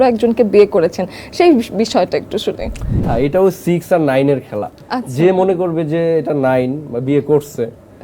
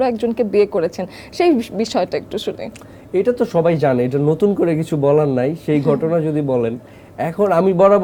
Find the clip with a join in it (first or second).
first